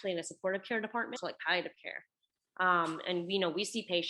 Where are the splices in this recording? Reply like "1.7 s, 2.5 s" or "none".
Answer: 1.1 s